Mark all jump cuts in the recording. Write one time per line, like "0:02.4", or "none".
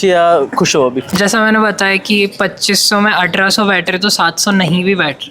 0:01.1